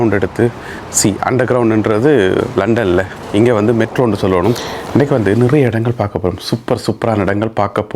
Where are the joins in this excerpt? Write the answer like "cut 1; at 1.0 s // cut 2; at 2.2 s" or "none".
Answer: cut 1; at 4.7 s